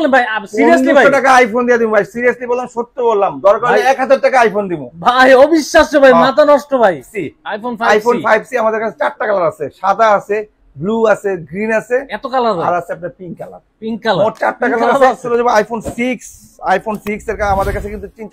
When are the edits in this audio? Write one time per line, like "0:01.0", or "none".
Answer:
0:07.1
0:15.2